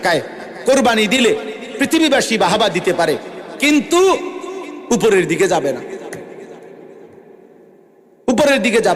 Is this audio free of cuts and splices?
yes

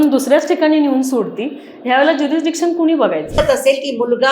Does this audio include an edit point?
yes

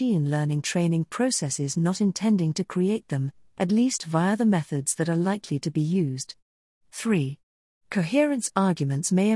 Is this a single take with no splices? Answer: no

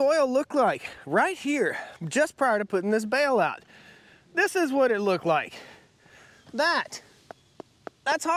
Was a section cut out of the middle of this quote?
no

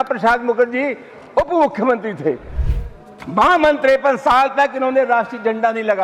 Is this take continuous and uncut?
no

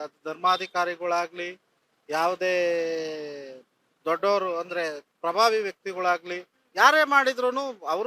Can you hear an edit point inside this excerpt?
no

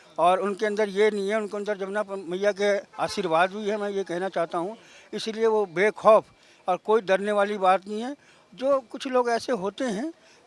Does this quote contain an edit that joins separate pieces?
no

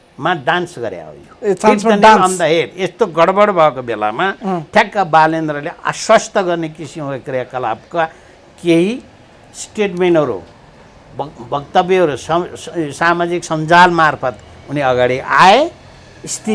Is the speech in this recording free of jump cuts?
yes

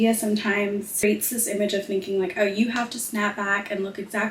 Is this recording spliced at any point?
yes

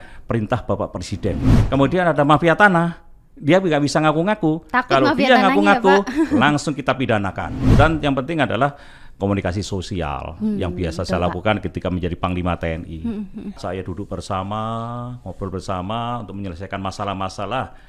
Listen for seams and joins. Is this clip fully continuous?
no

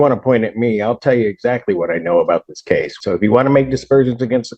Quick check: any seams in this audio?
yes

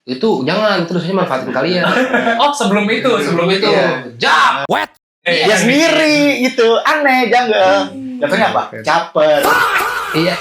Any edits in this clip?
no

